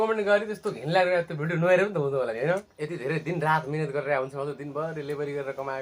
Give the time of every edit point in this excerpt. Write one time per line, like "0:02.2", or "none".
0:02.7